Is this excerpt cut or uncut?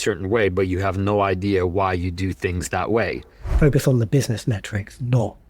cut